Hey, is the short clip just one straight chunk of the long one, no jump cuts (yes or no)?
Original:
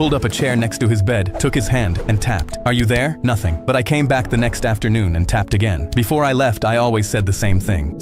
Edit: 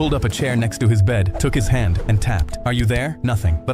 yes